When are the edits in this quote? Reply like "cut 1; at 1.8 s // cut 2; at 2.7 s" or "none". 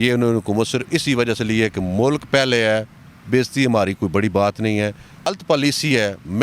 cut 1; at 5.3 s